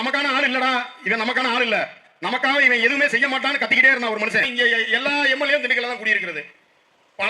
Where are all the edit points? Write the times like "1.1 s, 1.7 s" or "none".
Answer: 4.5 s